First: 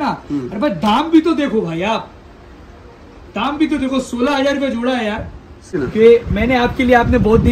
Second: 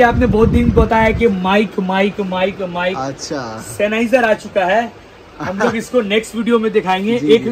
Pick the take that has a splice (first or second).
first